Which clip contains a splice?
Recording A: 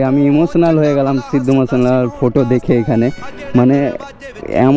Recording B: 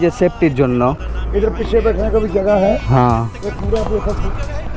B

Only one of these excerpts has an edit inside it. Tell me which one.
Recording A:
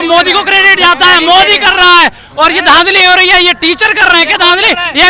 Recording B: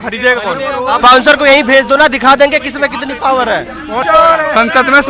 B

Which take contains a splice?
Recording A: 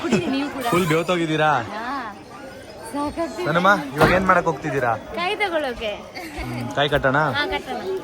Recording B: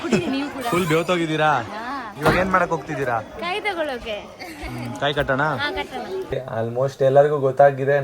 B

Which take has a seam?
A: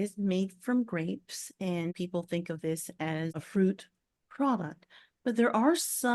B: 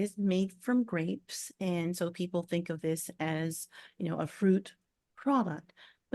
A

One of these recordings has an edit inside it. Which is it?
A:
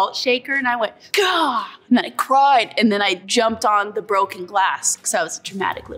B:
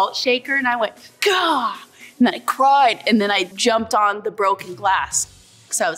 A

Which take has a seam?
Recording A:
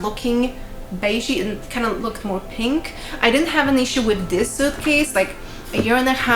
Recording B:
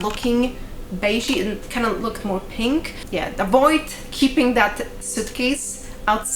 B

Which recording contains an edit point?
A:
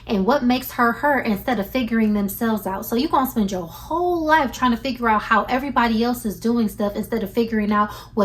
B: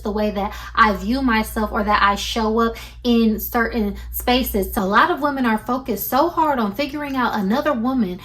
B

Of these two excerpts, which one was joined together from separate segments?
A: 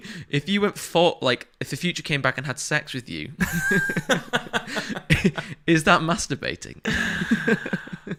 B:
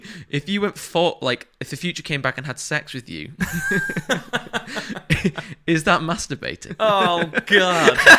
B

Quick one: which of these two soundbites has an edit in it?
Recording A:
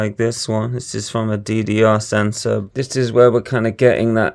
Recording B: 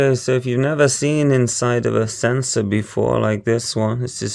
A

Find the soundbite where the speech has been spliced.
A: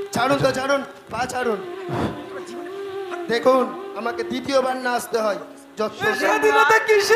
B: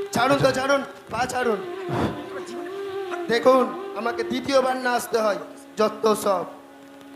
A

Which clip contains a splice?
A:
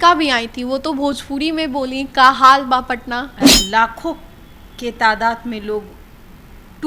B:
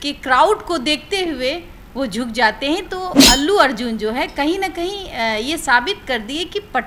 A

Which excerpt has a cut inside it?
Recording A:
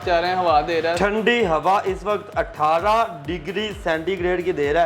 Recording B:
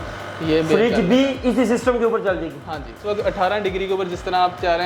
B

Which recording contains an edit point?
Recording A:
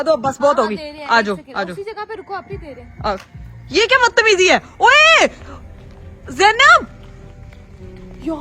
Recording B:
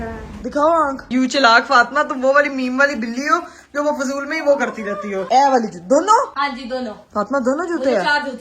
B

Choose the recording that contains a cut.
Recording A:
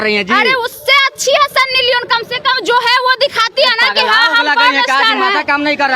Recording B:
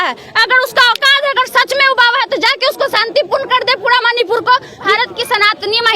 B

